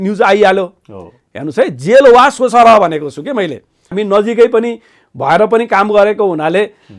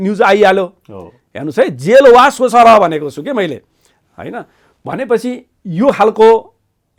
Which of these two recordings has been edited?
first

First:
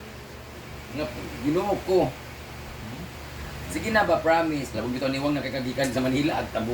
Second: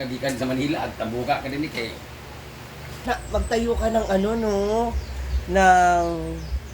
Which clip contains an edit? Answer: second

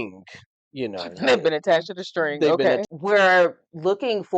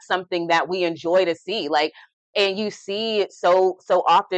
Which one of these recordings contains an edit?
first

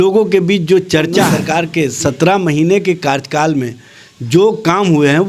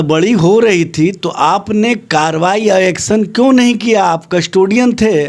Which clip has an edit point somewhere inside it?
first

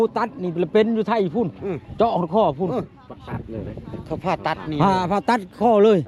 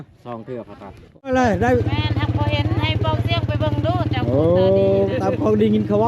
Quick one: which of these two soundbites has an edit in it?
second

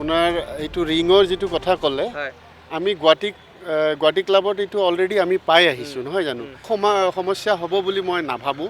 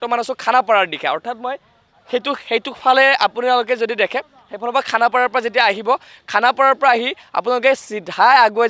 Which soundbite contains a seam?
first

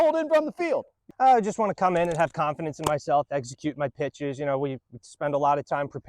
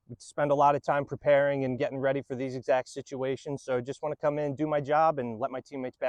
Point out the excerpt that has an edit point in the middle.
first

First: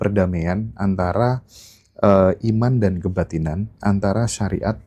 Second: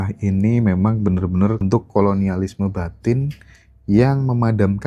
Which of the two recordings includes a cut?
second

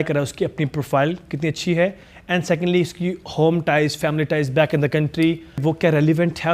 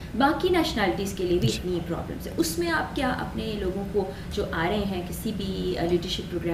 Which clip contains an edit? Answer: first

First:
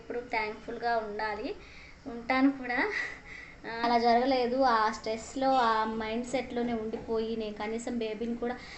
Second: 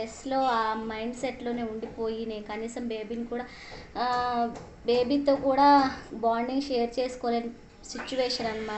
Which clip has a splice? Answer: first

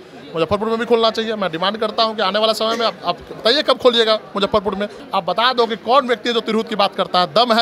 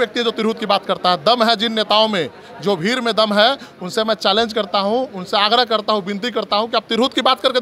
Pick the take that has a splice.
first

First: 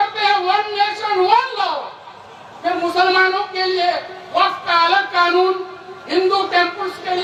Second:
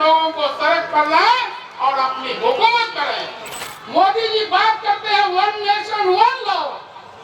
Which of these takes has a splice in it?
second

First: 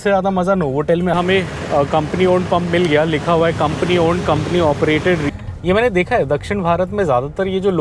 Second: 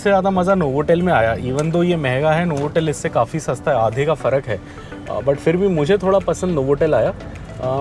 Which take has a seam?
first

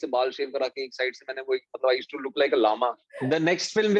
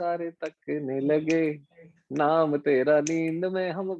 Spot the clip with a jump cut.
first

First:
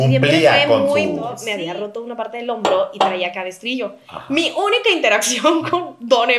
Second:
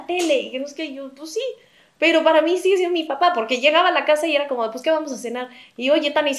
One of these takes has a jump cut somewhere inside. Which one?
first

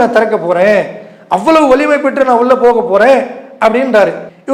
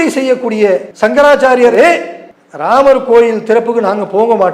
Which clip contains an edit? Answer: second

